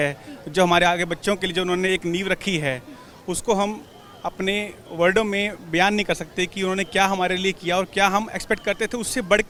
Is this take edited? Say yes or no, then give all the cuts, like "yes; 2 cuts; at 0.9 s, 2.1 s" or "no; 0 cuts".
no; 0 cuts